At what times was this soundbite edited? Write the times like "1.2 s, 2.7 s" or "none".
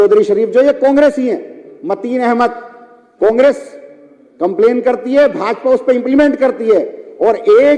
none